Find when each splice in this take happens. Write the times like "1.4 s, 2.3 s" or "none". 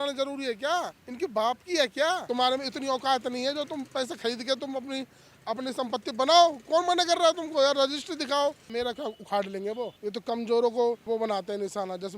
1.0 s, 2.2 s, 8.6 s, 9.9 s, 11.0 s